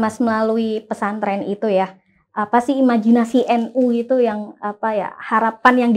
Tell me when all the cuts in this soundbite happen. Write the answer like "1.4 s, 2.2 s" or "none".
none

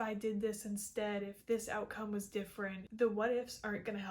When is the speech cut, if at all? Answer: 2.8 s

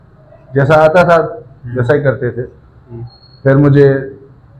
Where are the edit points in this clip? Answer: none

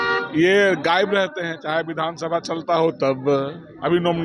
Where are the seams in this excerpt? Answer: none

